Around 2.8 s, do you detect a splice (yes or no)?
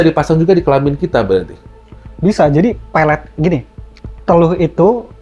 no